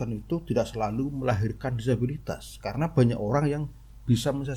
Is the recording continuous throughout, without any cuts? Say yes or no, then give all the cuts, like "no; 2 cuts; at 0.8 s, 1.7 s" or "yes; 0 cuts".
yes; 0 cuts